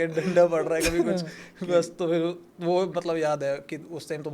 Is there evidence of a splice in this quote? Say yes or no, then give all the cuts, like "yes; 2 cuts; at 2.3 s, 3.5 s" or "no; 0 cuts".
no; 0 cuts